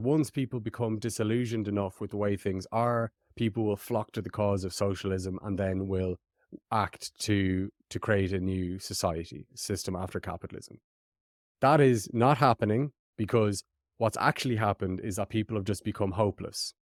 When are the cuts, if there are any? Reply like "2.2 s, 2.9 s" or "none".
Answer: none